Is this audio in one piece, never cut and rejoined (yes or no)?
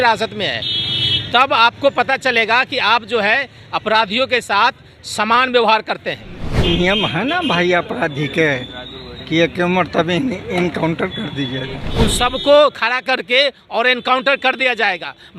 no